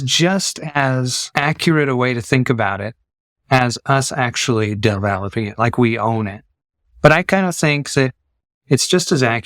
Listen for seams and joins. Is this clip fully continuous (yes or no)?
no